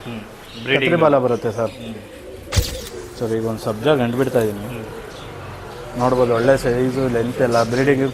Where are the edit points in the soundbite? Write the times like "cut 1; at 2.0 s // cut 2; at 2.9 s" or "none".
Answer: cut 1; at 2.8 s